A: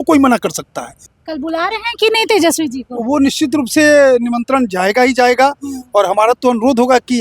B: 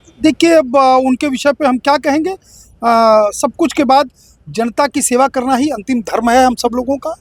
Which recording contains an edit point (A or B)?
A